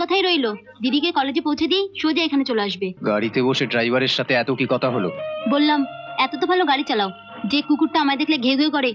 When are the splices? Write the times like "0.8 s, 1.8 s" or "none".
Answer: 3.0 s